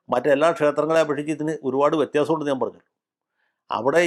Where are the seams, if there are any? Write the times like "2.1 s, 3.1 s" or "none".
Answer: none